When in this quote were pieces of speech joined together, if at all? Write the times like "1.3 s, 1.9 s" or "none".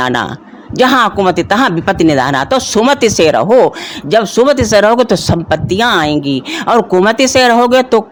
none